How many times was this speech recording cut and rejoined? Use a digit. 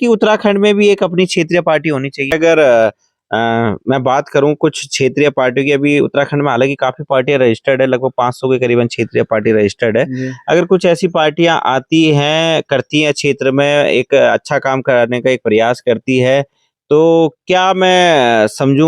1